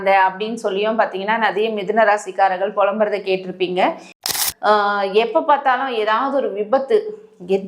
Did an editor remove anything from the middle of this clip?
yes; 1 cut; at 4.2 s

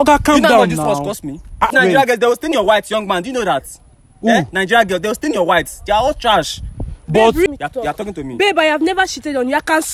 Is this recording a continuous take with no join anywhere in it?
no; 2 cuts; at 1.7 s, 7.5 s

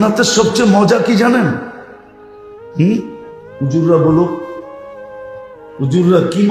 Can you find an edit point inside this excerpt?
no; 0 cuts

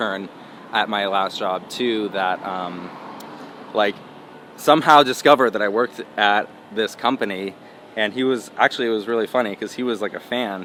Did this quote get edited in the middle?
no; 0 cuts

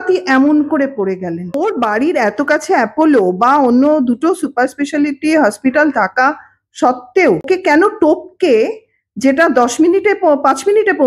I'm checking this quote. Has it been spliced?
yes; 2 cuts; at 1.6 s, 7.4 s

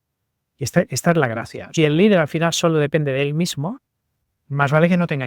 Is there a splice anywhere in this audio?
yes; 1 cut; at 1.5 s

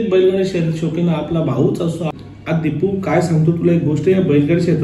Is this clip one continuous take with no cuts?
no; 1 cut; at 2.1 s

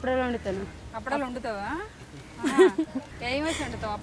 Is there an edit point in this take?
yes; 1 cut; at 3.1 s

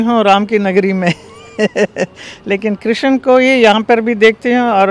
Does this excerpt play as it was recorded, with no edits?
yes; 0 cuts

